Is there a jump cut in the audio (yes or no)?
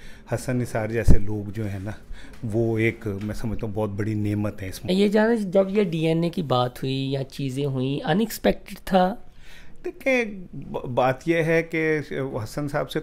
yes